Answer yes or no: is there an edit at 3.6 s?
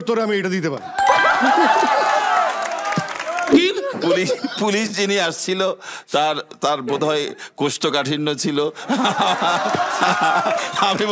yes